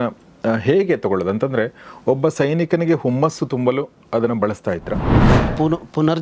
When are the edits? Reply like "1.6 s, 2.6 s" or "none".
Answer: 5.2 s